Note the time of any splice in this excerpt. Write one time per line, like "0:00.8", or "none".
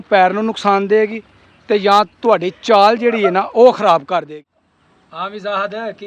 0:04.3